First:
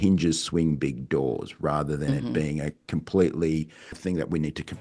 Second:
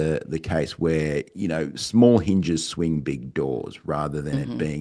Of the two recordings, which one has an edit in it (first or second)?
first